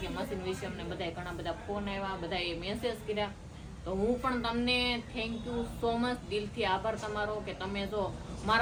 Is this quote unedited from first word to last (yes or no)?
yes